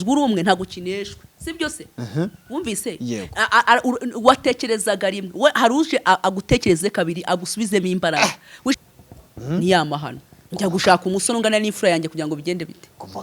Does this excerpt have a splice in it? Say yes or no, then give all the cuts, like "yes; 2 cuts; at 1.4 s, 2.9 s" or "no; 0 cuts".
yes; 1 cut; at 8.8 s